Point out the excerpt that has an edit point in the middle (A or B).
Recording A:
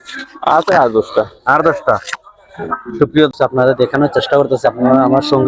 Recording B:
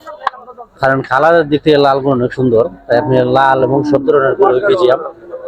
A